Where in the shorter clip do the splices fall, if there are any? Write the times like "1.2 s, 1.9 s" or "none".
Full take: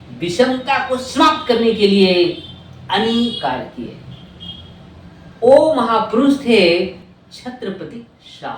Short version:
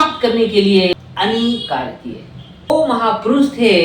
0.9 s, 2.7 s